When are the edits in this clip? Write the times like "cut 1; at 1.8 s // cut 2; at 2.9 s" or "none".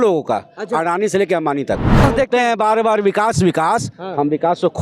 cut 1; at 2.0 s